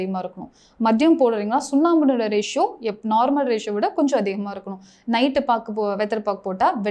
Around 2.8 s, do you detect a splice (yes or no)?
no